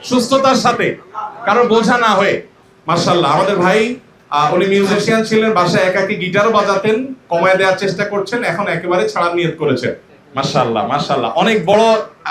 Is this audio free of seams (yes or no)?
no